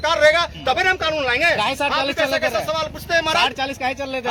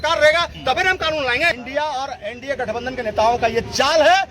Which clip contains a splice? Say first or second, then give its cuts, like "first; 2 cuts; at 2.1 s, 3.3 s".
second; 1 cut; at 1.5 s